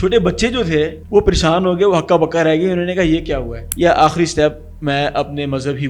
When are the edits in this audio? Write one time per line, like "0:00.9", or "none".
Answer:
0:03.7

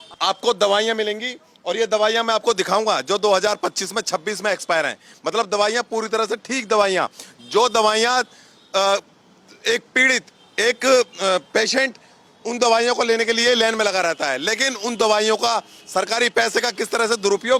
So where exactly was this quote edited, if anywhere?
none

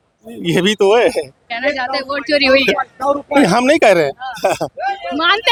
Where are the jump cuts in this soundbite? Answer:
none

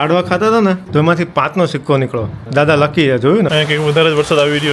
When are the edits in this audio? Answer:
0:03.5

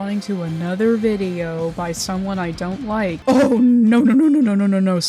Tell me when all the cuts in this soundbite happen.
0:03.2

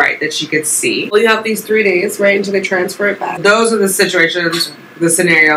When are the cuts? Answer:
0:01.1
0:03.4

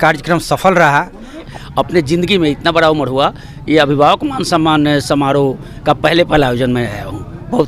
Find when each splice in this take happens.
0:01.5

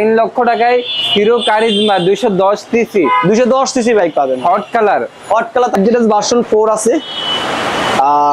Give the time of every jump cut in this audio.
0:05.8

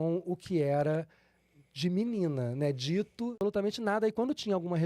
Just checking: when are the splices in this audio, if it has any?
0:03.4

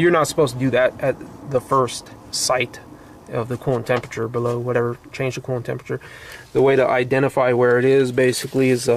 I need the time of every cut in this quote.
0:01.9

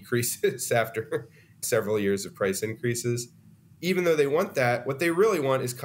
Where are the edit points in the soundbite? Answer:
0:01.6

